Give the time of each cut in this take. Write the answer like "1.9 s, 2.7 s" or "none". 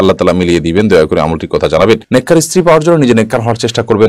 none